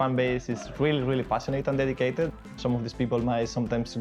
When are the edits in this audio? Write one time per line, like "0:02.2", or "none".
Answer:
0:02.3